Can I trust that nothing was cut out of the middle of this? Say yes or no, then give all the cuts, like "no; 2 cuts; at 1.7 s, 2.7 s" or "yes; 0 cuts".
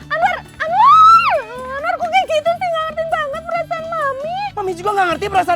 no; 1 cut; at 4.5 s